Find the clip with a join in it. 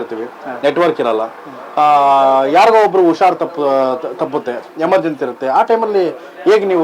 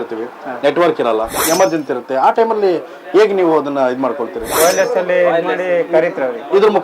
second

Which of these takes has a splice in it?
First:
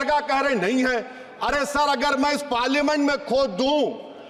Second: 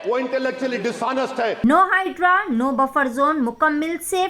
second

